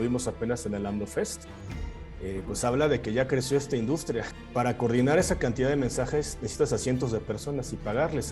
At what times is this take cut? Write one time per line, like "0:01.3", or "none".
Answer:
0:04.3